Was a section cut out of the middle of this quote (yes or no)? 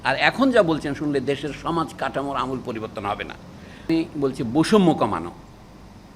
yes